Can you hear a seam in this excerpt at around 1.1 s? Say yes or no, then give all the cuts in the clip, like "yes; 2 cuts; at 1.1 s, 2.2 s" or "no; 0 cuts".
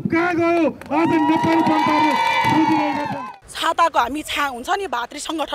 no; 1 cut; at 3.1 s